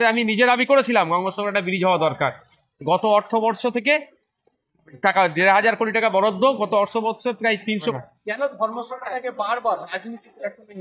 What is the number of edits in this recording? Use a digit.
1